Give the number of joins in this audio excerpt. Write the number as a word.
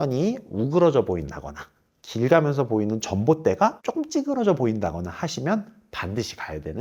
zero